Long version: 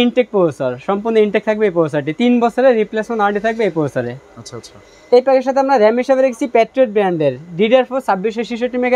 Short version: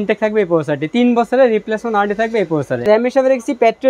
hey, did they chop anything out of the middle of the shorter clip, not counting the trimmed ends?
yes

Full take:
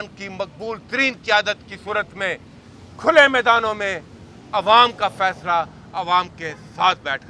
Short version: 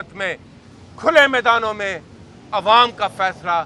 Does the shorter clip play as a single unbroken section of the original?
yes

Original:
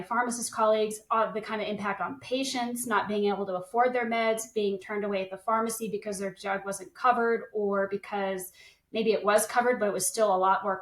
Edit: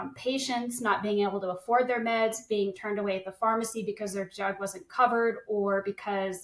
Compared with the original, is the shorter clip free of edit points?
yes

